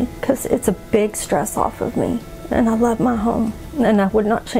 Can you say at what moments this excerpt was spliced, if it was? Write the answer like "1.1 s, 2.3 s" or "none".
2.3 s